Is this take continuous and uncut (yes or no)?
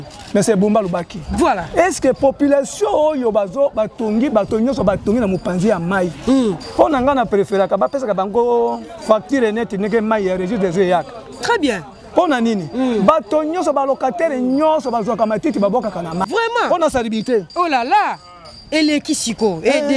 no